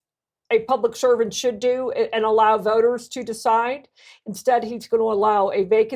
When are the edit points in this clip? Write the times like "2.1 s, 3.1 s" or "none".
none